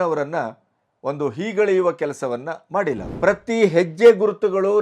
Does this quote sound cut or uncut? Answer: cut